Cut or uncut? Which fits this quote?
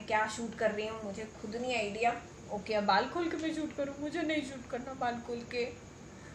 uncut